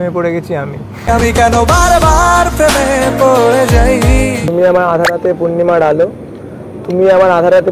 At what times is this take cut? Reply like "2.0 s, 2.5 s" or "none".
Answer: 4.4 s